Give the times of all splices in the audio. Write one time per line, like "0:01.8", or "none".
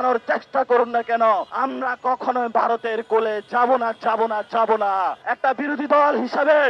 0:01.5
0:05.2